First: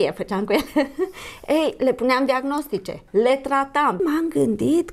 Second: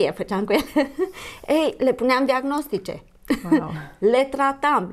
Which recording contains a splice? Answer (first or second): first